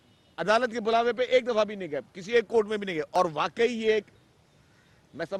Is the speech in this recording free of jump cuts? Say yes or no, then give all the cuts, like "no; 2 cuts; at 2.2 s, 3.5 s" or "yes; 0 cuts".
no; 1 cut; at 3.1 s